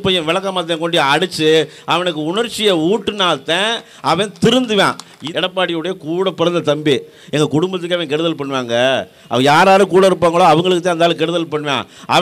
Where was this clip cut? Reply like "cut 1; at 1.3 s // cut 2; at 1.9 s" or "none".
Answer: cut 1; at 5.2 s